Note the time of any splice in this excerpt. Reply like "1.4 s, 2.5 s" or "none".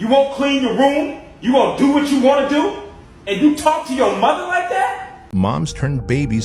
5.3 s